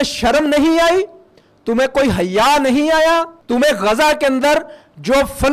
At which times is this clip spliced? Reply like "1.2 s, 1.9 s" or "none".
3.4 s